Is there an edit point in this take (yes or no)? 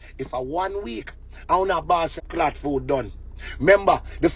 yes